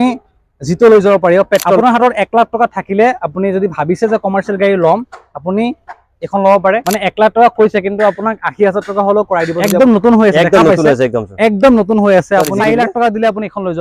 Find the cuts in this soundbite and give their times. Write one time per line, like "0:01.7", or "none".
0:01.8
0:06.9
0:09.6
0:12.5